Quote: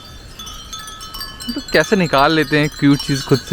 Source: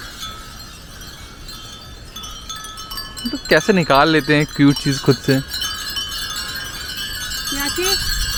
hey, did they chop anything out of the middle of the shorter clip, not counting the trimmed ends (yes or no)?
no